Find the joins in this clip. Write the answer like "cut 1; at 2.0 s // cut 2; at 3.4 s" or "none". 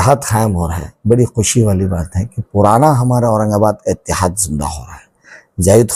none